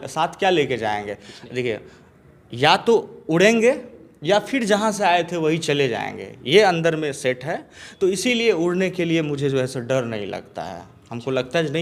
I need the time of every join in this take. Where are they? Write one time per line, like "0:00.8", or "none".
none